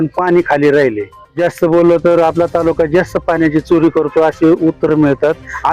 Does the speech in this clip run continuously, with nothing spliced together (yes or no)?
no